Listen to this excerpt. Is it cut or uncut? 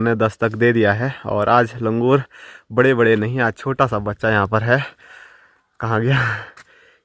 uncut